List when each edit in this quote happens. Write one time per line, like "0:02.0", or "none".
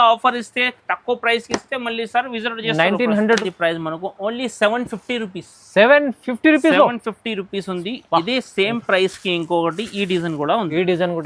0:03.4